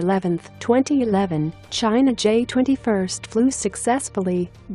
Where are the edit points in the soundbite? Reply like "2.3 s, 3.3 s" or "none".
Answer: none